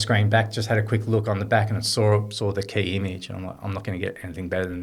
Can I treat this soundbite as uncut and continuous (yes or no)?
yes